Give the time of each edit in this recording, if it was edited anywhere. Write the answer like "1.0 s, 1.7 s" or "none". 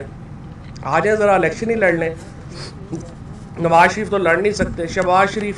none